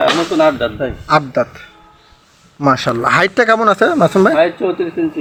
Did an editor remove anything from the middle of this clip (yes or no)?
no